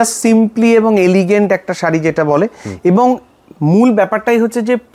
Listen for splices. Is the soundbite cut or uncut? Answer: uncut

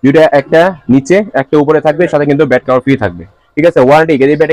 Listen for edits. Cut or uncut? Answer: uncut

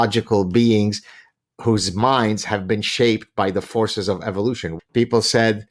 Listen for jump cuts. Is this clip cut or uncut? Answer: cut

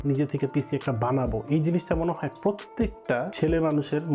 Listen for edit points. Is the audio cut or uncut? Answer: uncut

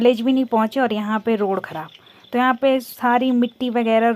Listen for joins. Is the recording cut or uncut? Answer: uncut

